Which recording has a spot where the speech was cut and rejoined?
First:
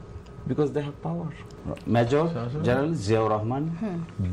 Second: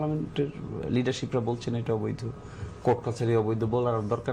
first; 1 cut; at 1.5 s

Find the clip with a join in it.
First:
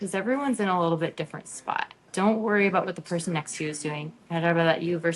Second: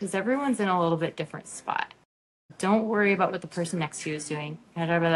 first; 1 cut; at 2.0 s

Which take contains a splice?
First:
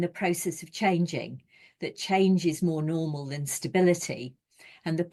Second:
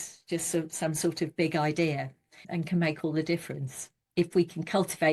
second; 2 cuts; at 2.4 s, 4.1 s

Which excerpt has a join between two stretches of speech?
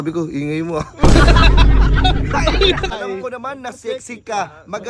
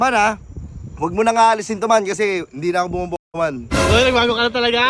first; 1 cut; at 2.9 s

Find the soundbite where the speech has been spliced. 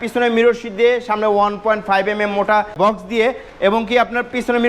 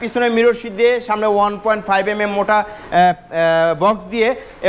first; 1 cut; at 2.8 s

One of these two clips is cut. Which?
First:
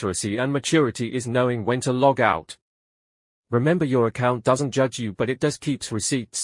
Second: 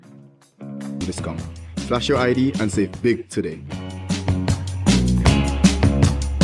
second; 1 cut; at 1.0 s

